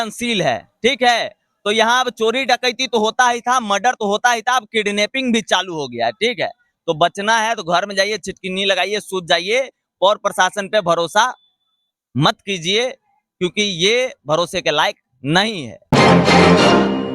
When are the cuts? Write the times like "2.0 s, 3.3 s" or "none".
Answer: 15.9 s

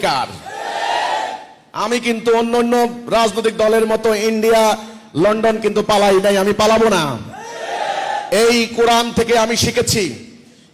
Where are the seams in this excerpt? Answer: none

